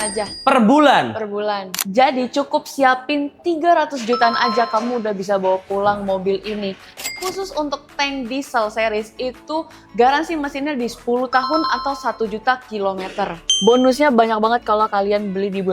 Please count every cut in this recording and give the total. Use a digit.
3